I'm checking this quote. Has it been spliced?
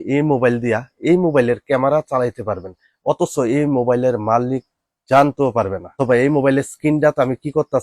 no; 0 cuts

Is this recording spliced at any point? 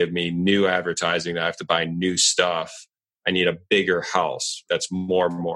yes; 1 cut; at 4.6 s

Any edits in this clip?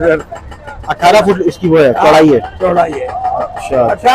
no; 0 cuts

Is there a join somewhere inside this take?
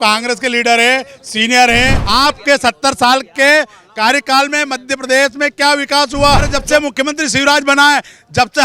yes; 2 cuts; at 2.0 s, 6.6 s

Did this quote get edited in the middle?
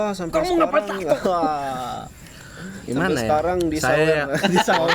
no; 0 cuts

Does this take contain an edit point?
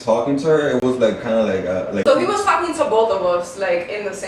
yes; 1 cut; at 2.0 s

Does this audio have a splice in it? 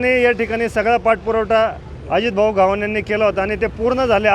no; 0 cuts

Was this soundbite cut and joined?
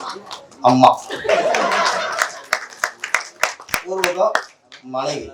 no; 0 cuts

